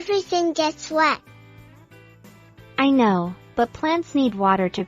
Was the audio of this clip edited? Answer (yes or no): yes